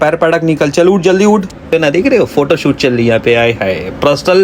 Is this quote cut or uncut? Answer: cut